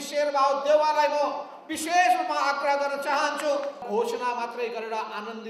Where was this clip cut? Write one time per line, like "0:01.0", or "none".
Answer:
0:03.8